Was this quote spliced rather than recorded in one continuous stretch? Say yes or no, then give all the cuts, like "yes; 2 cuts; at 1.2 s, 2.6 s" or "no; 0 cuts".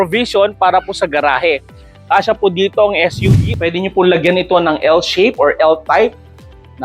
yes; 1 cut; at 3.2 s